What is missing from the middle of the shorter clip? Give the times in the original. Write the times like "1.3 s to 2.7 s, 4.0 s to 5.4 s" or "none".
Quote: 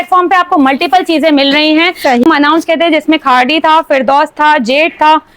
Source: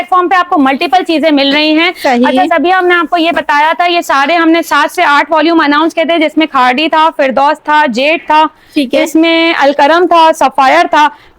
2.2 s to 5.5 s

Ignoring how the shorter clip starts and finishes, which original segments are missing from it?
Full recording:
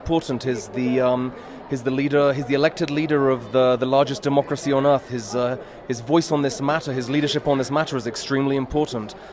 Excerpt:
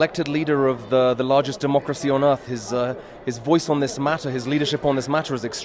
none

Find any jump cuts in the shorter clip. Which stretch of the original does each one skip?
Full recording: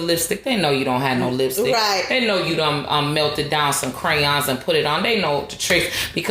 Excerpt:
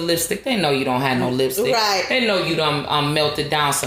none

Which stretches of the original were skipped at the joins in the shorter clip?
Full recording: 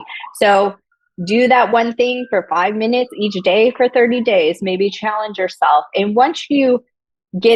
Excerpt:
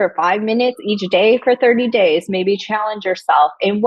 none

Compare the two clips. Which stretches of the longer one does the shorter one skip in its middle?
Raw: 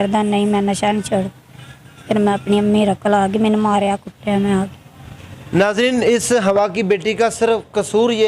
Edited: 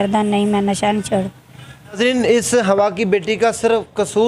1.9 s to 5.7 s

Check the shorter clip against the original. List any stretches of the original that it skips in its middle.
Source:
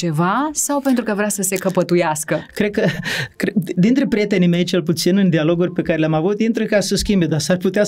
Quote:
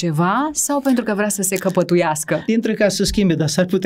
2.5 s to 6.4 s

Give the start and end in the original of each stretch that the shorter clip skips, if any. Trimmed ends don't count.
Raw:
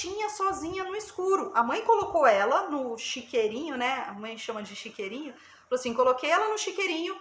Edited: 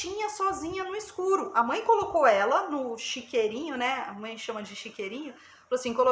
none

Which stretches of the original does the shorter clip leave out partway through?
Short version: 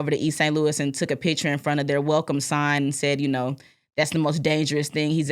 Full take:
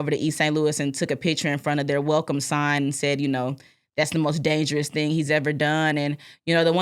none

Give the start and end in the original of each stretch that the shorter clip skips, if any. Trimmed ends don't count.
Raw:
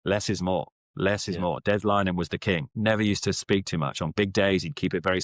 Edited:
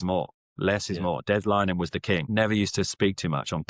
2.6 s to 2.7 s

